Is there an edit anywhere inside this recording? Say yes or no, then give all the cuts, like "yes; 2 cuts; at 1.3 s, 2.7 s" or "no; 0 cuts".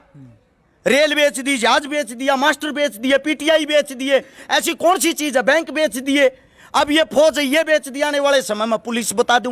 no; 0 cuts